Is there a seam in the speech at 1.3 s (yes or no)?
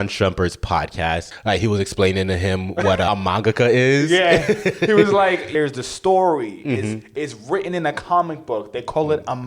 yes